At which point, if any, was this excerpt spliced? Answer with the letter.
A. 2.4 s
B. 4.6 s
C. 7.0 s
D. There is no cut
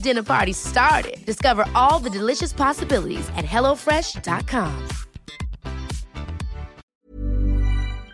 C